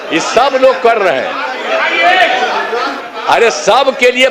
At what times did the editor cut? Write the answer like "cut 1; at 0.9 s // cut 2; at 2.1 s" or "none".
cut 1; at 2.9 s

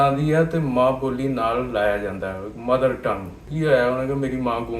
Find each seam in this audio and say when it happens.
cut 1; at 3.4 s

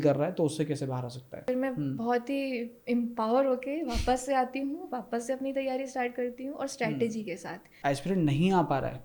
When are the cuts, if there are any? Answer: cut 1; at 1.5 s // cut 2; at 7.7 s

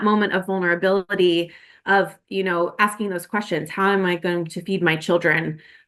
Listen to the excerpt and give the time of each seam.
none

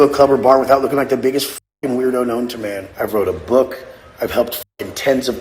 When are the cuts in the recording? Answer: cut 1; at 2.8 s

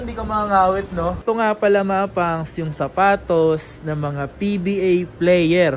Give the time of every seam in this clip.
cut 1; at 1.2 s

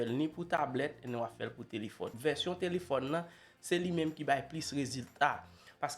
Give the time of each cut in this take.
cut 1; at 2.1 s

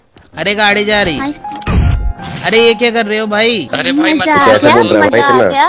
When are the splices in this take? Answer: cut 1; at 3.7 s

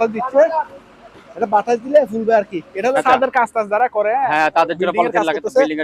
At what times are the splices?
cut 1; at 3.0 s

